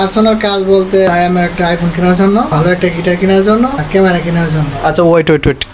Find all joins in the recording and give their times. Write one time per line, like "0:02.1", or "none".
0:01.1
0:02.5
0:03.8